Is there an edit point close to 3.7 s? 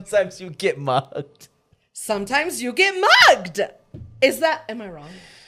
no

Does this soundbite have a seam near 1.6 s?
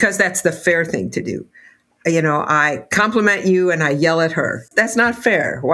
no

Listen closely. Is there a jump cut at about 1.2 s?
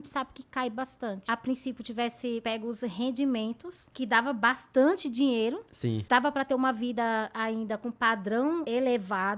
yes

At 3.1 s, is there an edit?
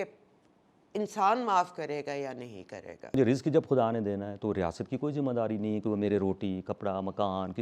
yes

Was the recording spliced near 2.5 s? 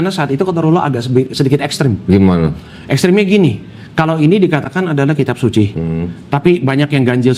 no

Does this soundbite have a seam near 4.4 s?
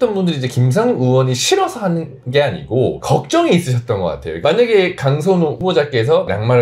yes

